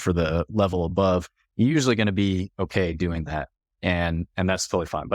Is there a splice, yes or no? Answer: no